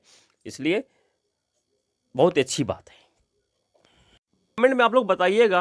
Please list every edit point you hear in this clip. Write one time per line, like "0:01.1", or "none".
0:04.6

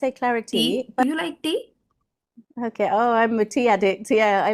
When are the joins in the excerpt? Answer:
0:01.0

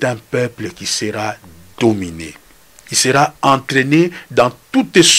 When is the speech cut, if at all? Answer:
none

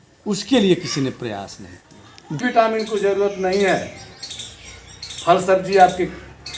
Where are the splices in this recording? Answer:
0:02.4

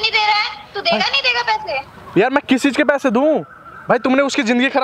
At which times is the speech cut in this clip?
none

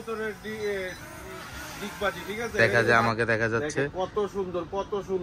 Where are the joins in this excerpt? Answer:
0:02.6

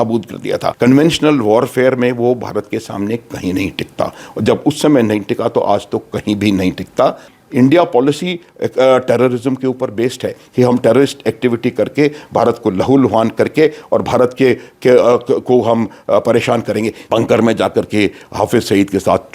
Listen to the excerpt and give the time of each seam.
0:00.7
0:07.3
0:17.0

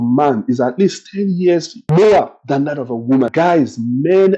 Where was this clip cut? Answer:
0:01.8
0:03.3

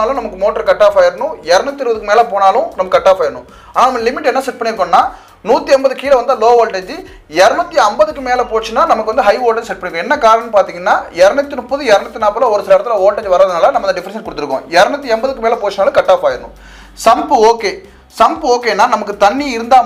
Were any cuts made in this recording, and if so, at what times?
none

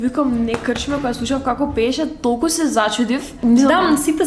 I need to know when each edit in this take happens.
0:03.3

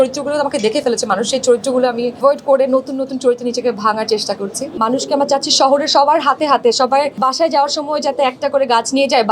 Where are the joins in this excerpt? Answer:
0:02.2
0:04.8
0:07.1

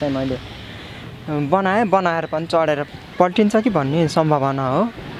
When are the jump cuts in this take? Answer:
0:02.9

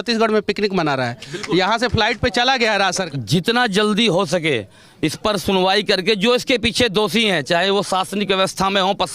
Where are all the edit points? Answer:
0:03.1

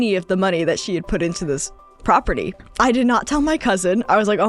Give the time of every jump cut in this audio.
0:02.6

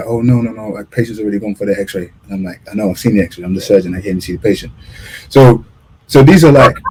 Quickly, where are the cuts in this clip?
none

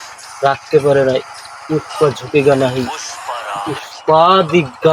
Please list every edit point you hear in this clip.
none

